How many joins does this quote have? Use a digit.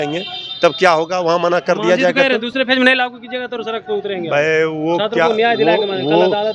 0